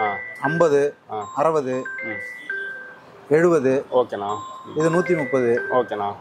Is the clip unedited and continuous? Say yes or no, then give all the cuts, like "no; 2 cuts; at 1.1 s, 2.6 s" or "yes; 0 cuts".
yes; 0 cuts